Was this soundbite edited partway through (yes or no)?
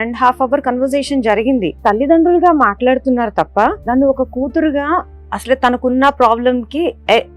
yes